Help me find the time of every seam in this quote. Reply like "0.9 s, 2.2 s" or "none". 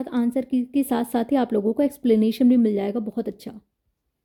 none